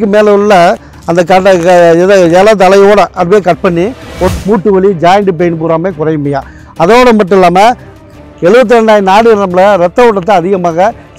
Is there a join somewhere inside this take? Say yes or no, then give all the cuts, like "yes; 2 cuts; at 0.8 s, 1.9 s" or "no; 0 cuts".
yes; 1 cut; at 4.3 s